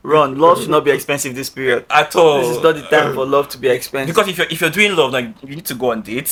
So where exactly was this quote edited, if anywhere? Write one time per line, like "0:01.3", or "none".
none

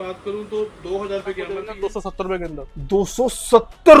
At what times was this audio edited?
0:01.6

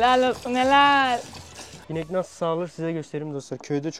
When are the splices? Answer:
none

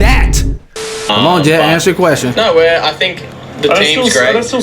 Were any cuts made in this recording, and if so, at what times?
0:01.0

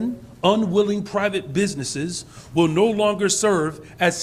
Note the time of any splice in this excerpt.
none

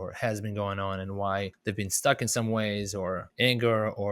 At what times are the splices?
0:01.5
0:03.3

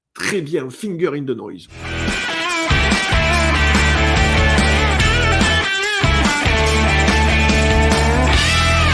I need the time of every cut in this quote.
0:01.7

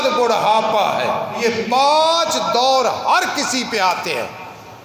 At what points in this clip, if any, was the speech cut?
0:01.4

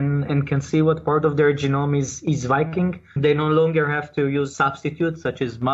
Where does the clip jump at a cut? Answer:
0:03.2
0:04.5

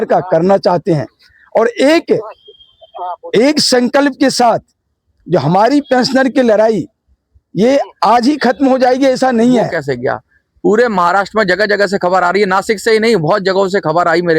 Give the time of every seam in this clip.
0:09.8

